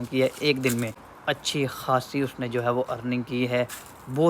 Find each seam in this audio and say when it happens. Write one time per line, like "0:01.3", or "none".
0:01.1

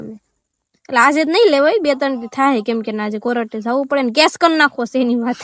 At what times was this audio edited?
none

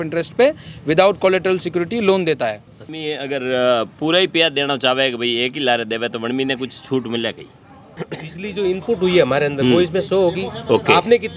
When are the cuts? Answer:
0:03.0
0:08.1

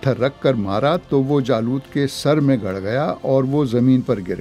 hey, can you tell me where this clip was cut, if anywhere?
none

